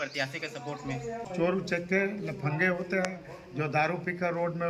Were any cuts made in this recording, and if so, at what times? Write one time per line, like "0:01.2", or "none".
0:01.3